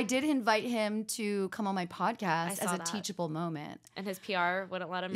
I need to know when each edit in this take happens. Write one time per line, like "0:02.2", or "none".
none